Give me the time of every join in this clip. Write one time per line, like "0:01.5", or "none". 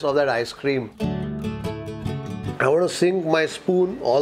0:00.9
0:02.4

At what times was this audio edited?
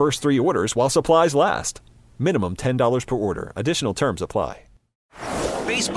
0:04.9

